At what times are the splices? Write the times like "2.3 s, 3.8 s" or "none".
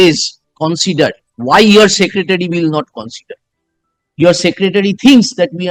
none